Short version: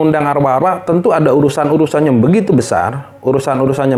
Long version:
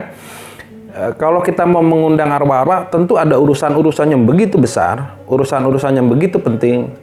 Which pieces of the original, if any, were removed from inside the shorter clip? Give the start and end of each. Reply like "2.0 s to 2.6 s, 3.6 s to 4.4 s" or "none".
none